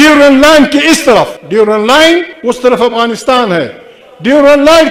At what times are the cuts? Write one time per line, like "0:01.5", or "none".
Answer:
none